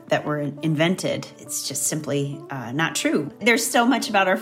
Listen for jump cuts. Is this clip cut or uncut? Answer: cut